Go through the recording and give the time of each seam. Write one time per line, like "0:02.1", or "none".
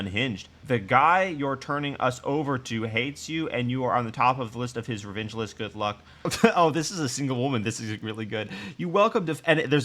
0:06.3